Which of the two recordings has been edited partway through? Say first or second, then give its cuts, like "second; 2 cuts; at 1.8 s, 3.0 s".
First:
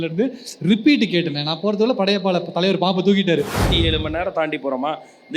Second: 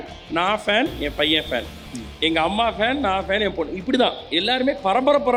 first; 1 cut; at 3.7 s